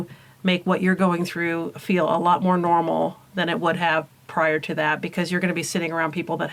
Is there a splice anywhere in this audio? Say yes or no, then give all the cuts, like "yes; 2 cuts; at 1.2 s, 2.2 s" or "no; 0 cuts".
no; 0 cuts